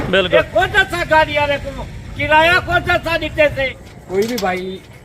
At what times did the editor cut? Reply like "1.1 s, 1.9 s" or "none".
3.8 s